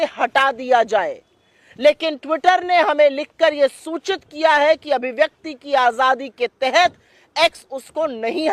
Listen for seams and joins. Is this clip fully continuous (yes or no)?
yes